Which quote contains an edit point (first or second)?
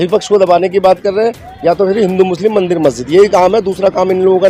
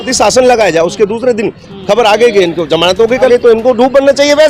second